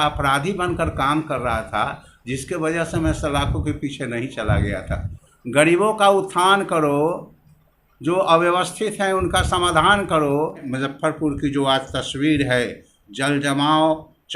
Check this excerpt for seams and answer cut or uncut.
cut